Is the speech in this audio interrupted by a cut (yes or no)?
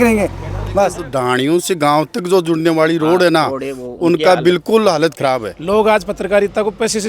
yes